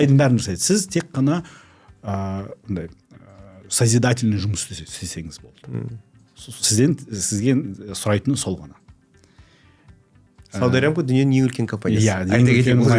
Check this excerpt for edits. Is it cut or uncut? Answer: uncut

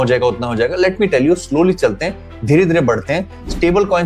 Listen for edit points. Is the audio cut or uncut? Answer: uncut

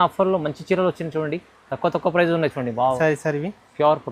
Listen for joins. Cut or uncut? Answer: cut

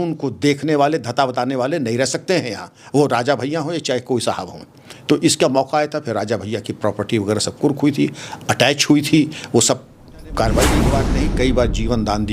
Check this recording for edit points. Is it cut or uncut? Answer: cut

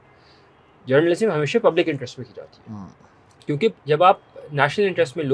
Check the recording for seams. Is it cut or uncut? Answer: uncut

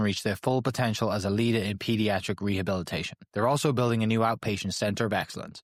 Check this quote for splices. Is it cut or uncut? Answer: uncut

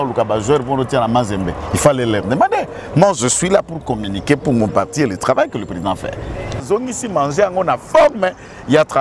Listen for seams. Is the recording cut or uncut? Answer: cut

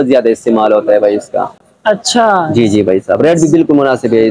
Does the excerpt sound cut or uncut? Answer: uncut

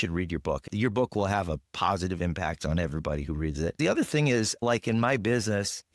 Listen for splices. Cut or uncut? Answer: cut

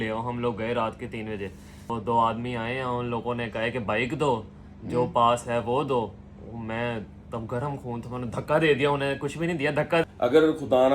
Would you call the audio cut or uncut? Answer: cut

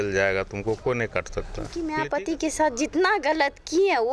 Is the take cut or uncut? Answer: cut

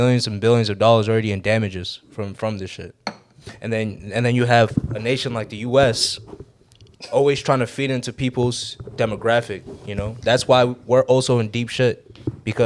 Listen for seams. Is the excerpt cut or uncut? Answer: uncut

